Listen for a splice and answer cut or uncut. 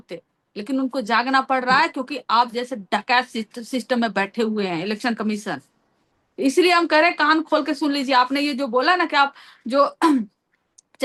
uncut